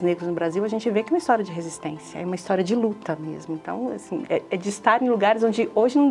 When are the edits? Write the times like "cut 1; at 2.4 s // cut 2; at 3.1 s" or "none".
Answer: none